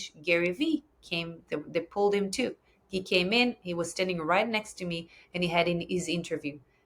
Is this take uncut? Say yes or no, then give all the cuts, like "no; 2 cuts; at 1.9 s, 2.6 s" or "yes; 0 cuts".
yes; 0 cuts